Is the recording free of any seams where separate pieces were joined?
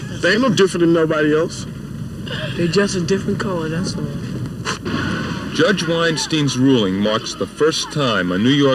no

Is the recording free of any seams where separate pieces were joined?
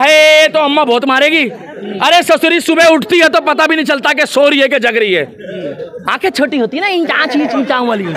yes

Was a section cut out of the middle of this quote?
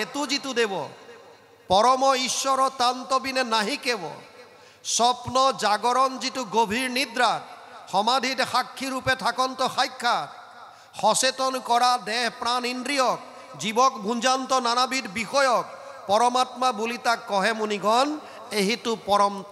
no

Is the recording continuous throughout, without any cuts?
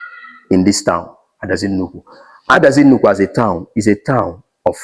no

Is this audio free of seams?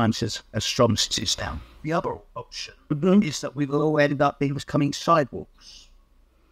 yes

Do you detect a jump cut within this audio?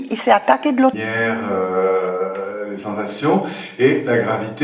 no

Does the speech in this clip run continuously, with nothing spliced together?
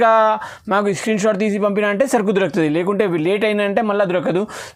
yes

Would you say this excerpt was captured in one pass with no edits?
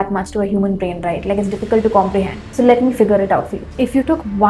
no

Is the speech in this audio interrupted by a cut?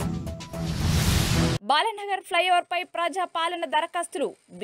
yes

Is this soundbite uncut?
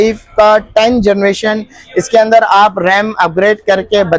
yes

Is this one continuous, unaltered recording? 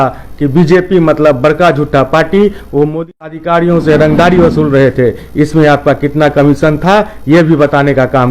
no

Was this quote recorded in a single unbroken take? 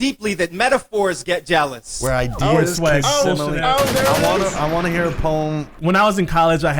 no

